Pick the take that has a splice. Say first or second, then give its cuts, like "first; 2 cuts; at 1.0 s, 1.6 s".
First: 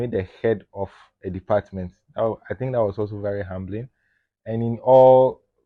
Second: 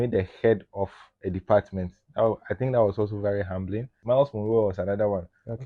second; 1 cut; at 3.9 s